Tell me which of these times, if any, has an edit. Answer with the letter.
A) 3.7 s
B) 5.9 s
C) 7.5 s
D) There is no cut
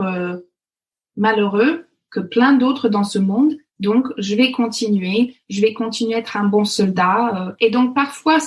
C